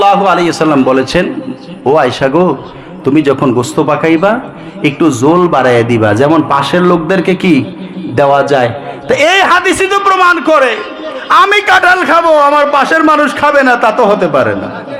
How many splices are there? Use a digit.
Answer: 0